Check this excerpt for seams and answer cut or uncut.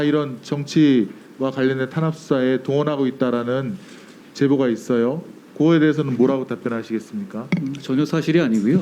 uncut